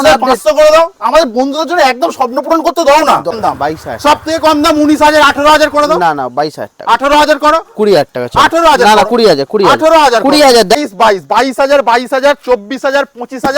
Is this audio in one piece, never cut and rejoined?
no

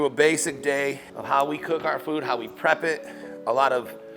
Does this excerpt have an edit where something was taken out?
yes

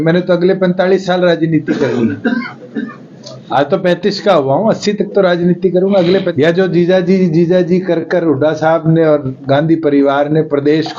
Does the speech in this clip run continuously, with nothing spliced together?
no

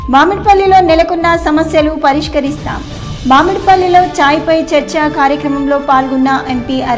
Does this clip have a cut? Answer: no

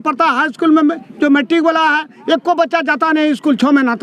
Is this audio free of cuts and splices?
yes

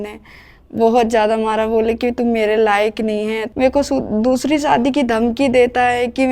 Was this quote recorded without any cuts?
no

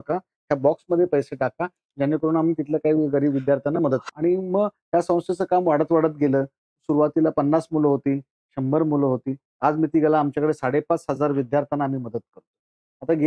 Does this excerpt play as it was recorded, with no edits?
no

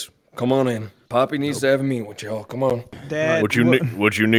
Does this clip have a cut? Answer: yes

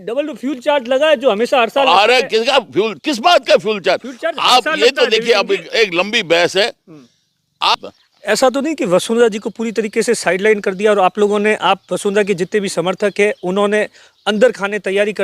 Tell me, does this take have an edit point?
yes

